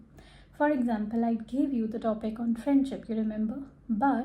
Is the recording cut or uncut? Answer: uncut